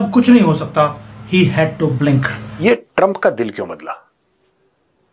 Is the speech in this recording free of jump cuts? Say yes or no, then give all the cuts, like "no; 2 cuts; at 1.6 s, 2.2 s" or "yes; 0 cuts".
no; 1 cut; at 2.6 s